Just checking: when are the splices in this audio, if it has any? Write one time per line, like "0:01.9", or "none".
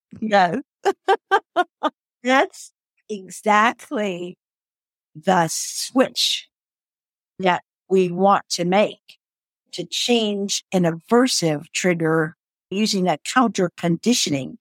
0:12.7